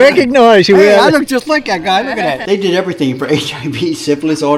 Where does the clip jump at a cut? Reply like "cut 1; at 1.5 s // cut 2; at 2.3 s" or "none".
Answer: cut 1; at 2.4 s